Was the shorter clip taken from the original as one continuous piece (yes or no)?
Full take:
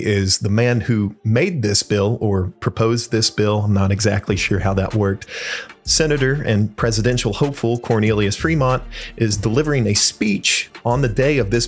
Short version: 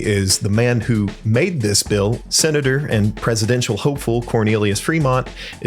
no